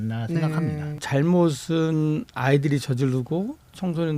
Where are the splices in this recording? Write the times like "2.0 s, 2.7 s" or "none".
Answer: 1.0 s